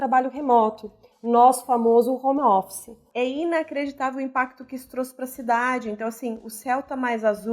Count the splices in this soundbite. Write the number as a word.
one